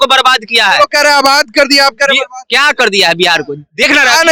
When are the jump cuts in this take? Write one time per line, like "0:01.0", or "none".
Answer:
none